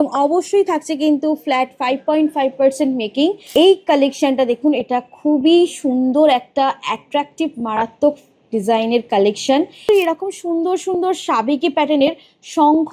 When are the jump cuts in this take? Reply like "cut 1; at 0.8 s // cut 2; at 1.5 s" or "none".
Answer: cut 1; at 3.4 s // cut 2; at 9.8 s